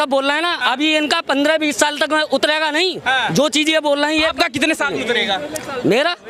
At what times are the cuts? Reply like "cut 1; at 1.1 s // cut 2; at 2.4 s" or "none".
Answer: none